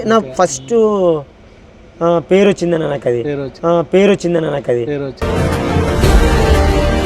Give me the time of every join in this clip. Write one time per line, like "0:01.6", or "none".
none